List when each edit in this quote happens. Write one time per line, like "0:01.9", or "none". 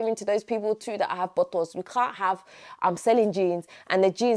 none